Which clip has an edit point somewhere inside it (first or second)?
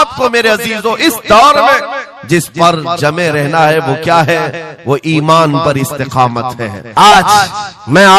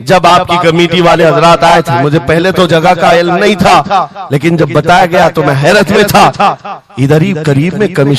first